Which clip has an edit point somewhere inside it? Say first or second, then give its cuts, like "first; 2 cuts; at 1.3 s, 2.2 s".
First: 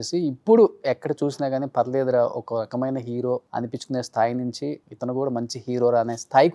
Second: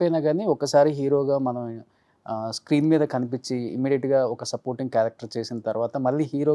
first; 2 cuts; at 3.5 s, 4.9 s